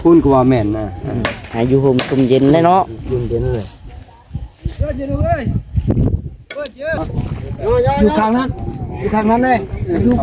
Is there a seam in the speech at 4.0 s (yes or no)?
no